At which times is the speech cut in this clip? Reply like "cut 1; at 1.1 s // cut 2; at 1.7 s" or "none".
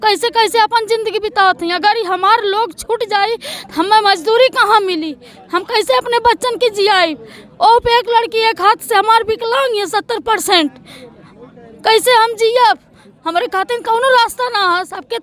none